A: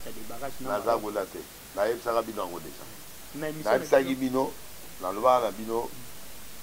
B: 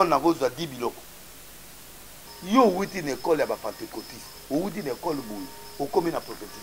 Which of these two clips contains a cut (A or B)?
B